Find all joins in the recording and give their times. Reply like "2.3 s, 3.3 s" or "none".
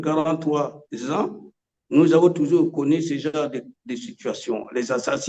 none